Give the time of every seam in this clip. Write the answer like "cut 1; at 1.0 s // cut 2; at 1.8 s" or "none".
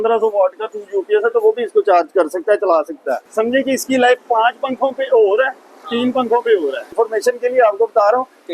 cut 1; at 3.2 s // cut 2; at 6.9 s

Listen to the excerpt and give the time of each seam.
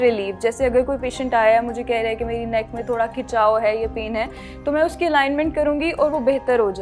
none

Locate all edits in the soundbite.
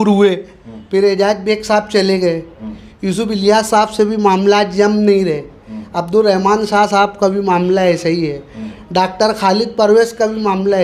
none

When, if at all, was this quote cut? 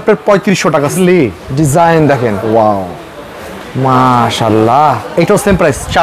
cut 1; at 0.9 s

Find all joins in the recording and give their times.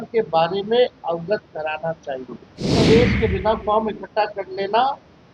cut 1; at 2.7 s

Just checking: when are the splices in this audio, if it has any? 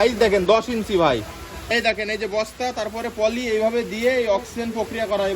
cut 1; at 1.7 s

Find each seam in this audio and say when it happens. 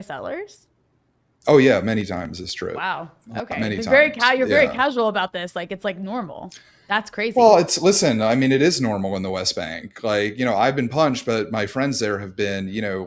none

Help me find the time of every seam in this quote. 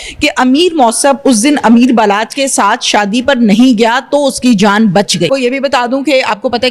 cut 1; at 5.3 s

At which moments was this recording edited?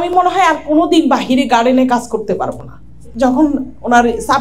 cut 1; at 3.0 s

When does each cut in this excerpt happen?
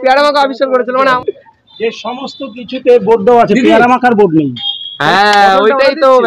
cut 1; at 1.2 s

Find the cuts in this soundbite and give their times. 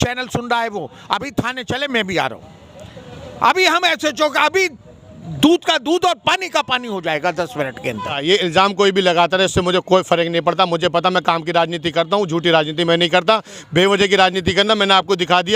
cut 1; at 8.1 s

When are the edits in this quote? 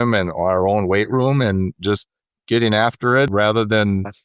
cut 1; at 1.8 s // cut 2; at 3.3 s

